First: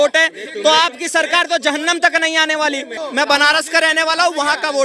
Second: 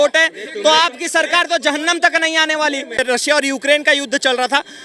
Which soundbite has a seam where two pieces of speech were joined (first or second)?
first